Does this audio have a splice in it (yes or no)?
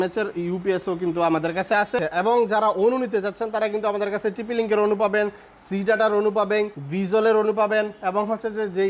no